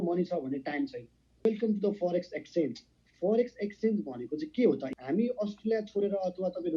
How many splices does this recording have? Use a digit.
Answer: 2